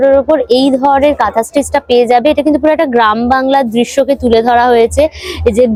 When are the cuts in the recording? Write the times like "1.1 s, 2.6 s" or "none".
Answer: none

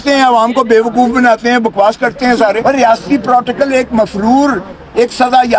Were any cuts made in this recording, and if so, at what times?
2.6 s

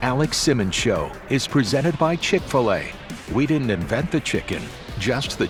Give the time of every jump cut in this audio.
none

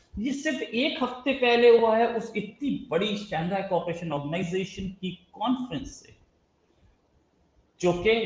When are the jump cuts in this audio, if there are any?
none

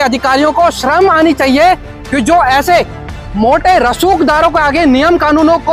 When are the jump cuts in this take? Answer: none

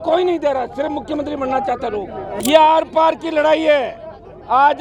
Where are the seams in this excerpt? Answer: 2.4 s

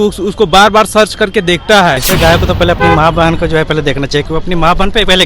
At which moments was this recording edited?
2.0 s

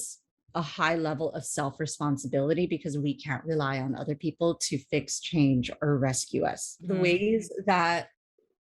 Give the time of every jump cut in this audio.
6.8 s

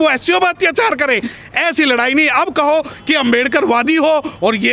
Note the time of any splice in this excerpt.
none

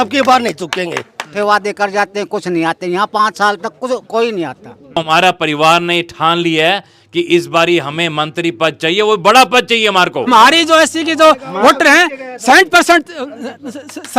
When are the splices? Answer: 1.3 s, 5.0 s, 10.3 s

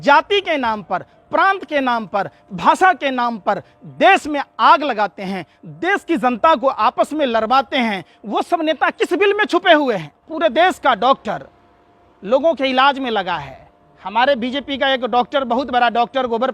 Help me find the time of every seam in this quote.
10.2 s

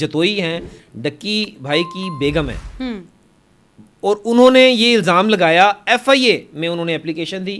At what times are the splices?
none

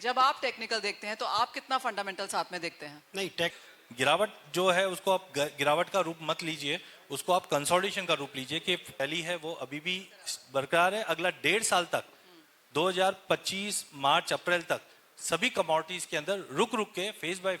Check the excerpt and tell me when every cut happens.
3.5 s, 9.0 s

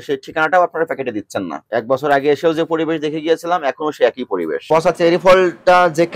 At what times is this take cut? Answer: 1.6 s, 4.6 s

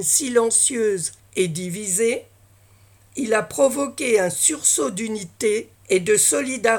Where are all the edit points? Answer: 1.2 s, 5.7 s

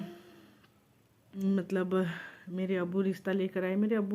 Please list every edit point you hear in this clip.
1.4 s

